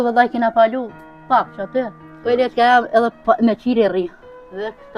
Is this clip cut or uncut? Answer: cut